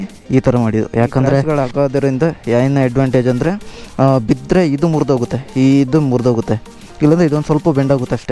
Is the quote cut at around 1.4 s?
yes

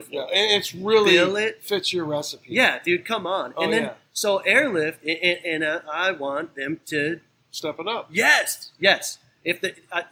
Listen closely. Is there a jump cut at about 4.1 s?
no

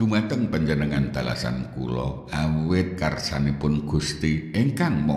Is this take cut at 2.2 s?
yes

